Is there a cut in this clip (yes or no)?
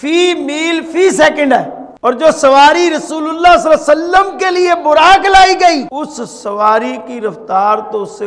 yes